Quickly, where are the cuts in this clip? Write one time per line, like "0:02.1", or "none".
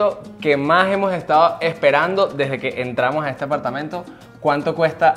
none